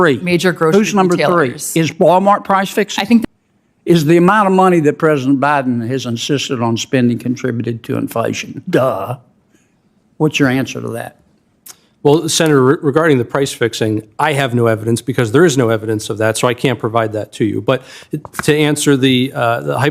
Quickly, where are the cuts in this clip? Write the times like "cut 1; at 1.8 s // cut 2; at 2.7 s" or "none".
cut 1; at 3.2 s